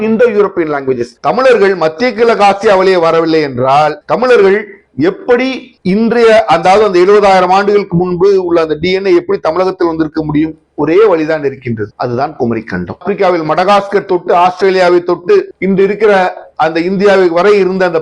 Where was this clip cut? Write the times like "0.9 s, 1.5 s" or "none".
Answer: 1.1 s, 13.0 s